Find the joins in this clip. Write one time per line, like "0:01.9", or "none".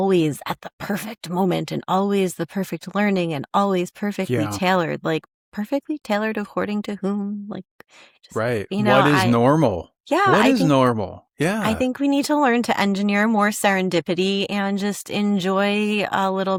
none